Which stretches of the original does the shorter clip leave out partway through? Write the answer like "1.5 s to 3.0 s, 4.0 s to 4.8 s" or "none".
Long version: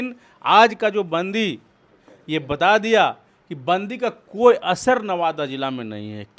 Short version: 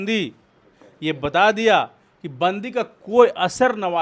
none